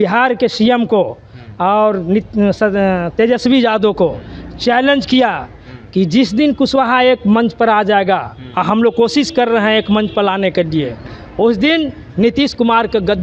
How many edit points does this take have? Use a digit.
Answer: 0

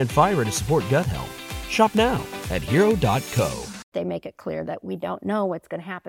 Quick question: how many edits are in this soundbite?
1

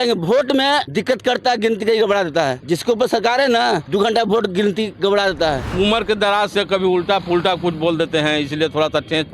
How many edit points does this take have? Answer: 4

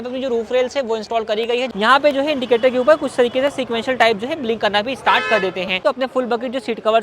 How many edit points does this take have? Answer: 2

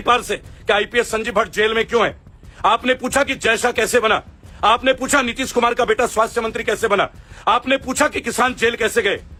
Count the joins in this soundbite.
0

